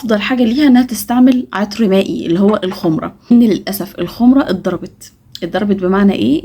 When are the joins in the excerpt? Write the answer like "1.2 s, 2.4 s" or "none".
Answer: 3.3 s